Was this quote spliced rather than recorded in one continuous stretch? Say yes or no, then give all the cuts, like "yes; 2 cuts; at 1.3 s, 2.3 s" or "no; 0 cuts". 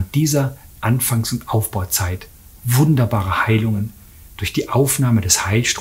no; 0 cuts